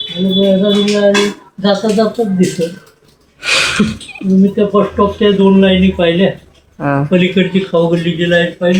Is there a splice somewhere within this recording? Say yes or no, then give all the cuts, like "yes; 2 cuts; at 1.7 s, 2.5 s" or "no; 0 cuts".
no; 0 cuts